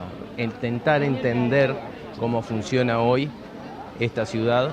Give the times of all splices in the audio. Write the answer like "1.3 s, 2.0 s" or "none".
none